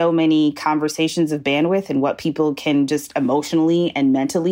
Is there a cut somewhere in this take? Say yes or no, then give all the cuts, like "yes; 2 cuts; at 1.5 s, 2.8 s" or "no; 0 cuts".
no; 0 cuts